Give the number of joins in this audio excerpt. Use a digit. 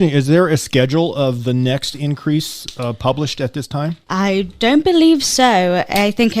1